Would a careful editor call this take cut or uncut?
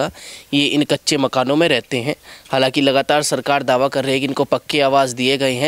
uncut